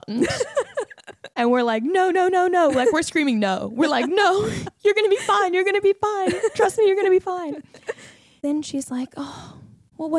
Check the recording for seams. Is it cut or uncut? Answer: uncut